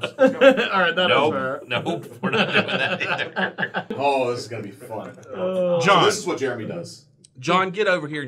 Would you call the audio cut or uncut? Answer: cut